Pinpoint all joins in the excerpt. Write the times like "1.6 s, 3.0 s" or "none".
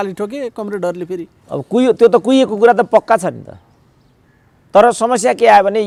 none